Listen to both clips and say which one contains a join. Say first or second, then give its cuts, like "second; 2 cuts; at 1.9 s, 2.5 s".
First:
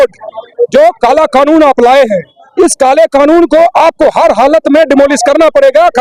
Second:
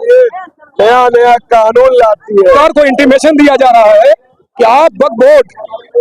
second; 1 cut; at 2.6 s